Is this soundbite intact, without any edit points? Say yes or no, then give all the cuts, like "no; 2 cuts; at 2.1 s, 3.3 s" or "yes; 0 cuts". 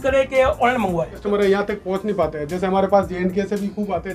no; 1 cut; at 1.2 s